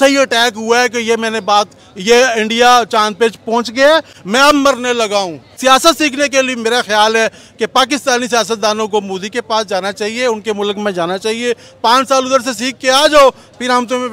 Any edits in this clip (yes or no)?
yes